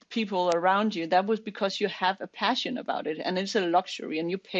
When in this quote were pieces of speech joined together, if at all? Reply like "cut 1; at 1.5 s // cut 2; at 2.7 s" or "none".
none